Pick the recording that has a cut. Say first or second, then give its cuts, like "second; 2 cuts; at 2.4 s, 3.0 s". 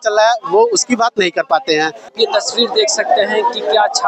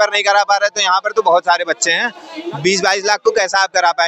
first; 1 cut; at 2.1 s